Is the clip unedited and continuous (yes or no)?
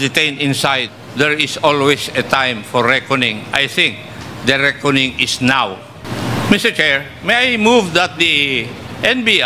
no